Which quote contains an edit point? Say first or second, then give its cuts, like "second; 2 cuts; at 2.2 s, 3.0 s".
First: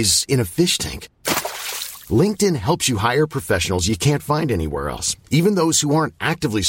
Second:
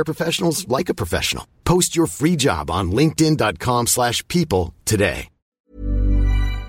second; 1 cut; at 5.6 s